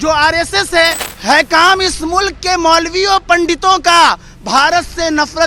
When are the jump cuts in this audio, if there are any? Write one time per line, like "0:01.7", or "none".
0:01.1